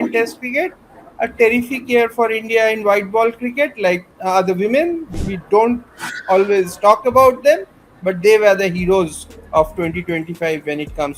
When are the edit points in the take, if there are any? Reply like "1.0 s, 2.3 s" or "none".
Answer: 4.1 s, 5.1 s